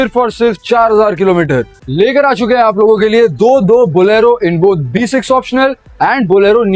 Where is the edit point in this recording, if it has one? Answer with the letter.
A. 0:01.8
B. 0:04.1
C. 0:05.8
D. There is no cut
A